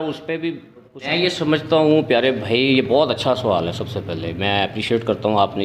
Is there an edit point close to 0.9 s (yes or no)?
yes